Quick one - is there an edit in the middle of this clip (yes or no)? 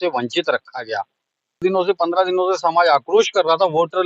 yes